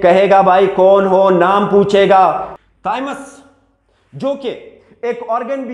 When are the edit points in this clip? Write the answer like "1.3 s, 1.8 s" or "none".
2.5 s